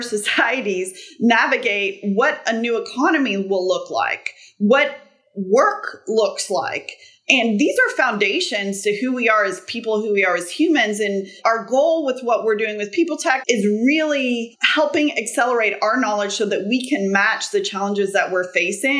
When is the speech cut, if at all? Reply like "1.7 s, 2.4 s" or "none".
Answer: 13.4 s

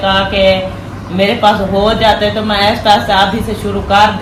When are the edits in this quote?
none

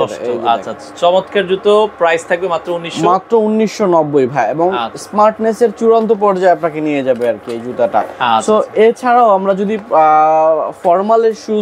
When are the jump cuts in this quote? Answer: none

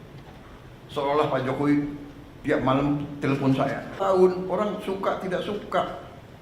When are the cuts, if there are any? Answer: 4.0 s

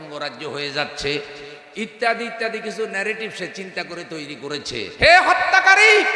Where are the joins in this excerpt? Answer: 4.8 s

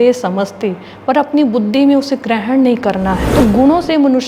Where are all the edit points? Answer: 3.2 s

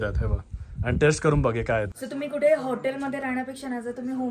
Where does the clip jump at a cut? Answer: 1.9 s

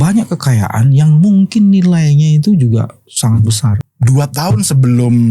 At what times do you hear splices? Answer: 3.9 s

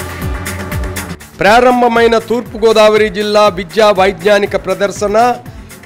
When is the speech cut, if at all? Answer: none

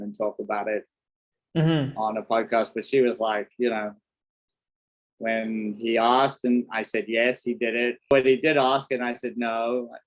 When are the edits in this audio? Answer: 8.1 s

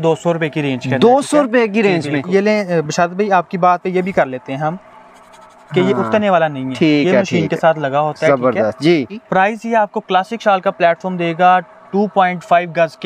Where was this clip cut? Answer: 2.2 s, 9.2 s

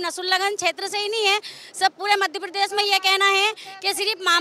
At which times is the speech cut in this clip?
none

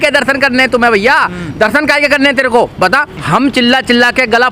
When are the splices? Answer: 3.1 s

